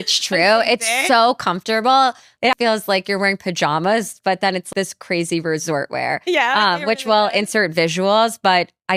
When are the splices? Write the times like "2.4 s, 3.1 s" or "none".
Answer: none

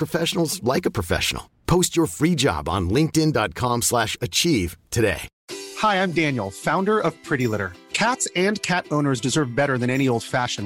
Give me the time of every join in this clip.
5.3 s

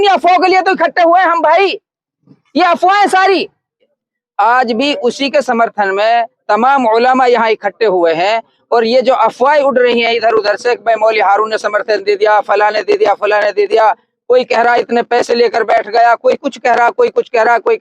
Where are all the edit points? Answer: 3.9 s

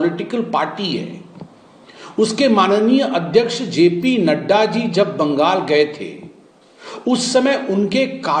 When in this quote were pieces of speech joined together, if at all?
none

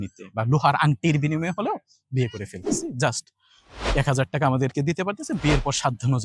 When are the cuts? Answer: 2.7 s

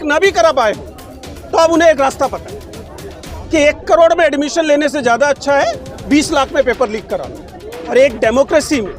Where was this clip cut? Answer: 7.9 s

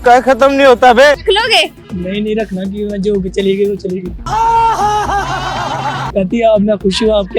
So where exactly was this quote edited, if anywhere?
1.2 s, 6.0 s

